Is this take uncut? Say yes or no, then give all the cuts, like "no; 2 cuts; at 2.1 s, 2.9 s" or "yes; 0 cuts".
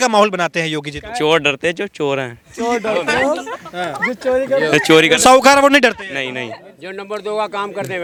yes; 0 cuts